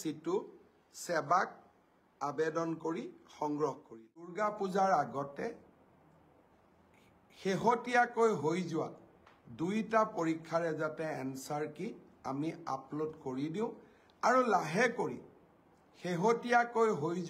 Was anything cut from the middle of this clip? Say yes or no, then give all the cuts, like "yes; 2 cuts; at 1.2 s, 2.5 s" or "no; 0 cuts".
yes; 1 cut; at 4.3 s